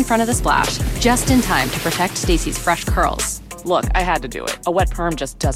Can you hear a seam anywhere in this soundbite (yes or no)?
no